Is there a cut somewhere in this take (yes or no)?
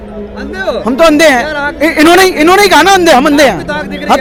no